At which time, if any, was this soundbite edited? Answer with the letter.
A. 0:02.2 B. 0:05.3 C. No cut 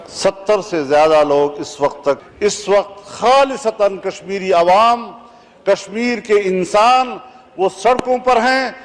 A